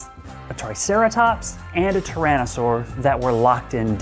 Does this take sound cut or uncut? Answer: uncut